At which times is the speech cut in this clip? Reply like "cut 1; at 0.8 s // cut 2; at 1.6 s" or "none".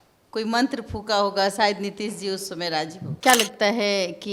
cut 1; at 3.1 s